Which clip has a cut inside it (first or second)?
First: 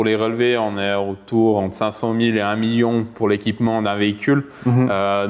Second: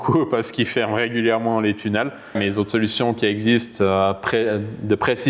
second